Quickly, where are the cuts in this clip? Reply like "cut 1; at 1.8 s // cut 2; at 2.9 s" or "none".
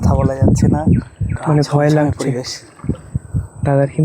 cut 1; at 1.3 s